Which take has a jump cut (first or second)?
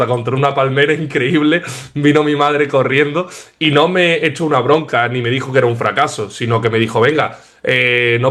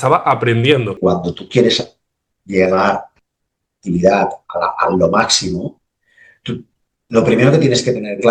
second